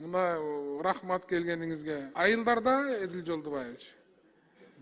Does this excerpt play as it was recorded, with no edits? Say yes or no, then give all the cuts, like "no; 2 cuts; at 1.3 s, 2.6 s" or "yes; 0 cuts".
no; 1 cut; at 2.1 s